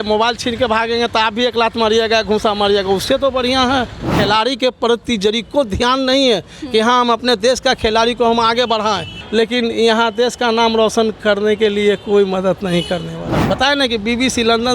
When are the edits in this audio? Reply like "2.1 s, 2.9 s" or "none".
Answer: 4.1 s, 9.1 s, 13.4 s